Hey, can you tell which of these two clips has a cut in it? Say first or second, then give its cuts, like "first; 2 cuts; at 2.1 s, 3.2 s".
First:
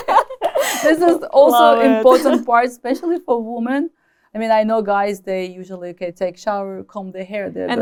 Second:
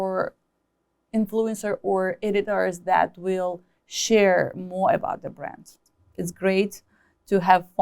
second; 1 cut; at 5.9 s